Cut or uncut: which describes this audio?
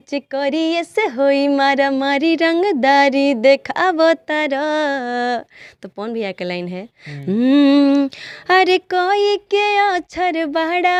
uncut